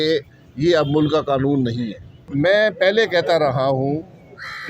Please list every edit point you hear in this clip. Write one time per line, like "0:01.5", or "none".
0:02.2